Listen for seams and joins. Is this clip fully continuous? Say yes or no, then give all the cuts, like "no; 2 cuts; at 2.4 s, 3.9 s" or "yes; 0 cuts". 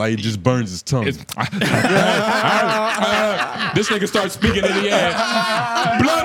yes; 0 cuts